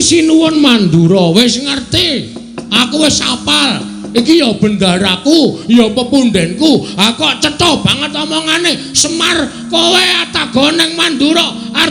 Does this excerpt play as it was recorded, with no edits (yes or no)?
yes